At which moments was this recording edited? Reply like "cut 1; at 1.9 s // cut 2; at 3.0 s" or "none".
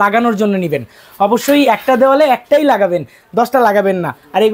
none

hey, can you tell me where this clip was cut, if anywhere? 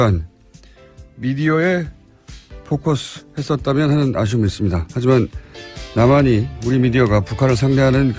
cut 1; at 2.1 s

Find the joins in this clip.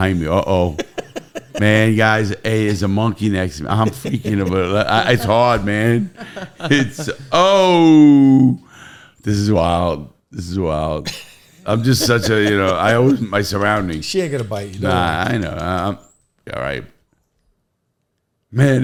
none

